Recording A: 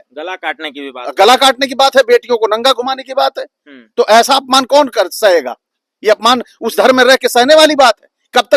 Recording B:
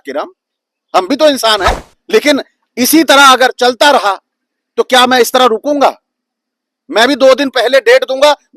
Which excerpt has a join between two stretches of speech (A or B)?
B